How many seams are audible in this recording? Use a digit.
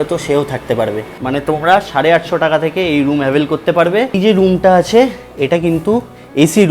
2